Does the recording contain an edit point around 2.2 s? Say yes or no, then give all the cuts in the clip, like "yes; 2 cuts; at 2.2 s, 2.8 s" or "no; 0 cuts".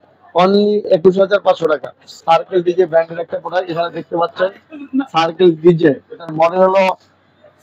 yes; 1 cut; at 2.2 s